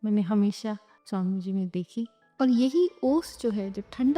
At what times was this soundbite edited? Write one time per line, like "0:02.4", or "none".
0:00.9
0:02.2